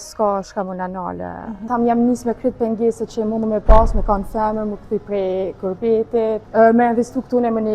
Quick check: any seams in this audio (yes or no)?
yes